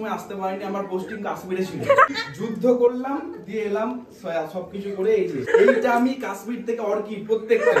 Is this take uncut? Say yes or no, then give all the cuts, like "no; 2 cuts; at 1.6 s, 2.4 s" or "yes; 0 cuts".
no; 2 cuts; at 2.1 s, 5.5 s